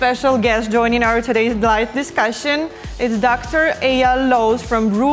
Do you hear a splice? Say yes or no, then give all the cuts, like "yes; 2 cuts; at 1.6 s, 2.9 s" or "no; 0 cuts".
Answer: no; 0 cuts